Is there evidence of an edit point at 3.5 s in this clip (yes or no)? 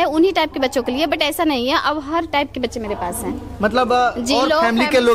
no